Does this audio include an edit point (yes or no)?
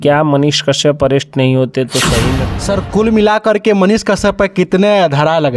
yes